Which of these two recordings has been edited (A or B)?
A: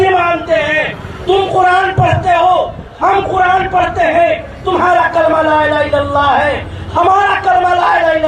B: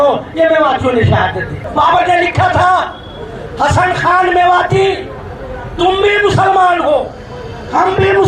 B